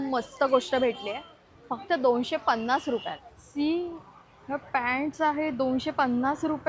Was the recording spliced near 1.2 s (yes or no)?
no